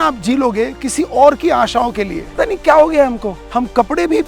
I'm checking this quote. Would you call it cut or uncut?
cut